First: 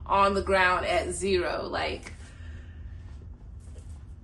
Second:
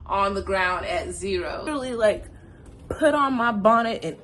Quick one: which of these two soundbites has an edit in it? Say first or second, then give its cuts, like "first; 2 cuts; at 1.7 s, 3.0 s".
second; 1 cut; at 1.7 s